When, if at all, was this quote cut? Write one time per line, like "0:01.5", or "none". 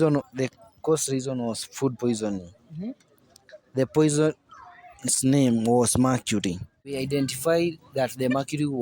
0:07.0